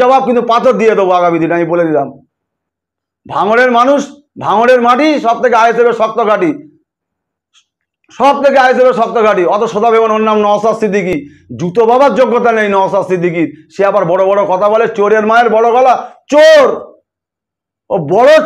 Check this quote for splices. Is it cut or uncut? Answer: uncut